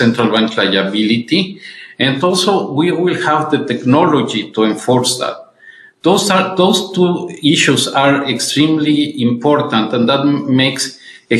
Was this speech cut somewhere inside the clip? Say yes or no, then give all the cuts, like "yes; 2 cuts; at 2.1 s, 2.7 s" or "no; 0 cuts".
no; 0 cuts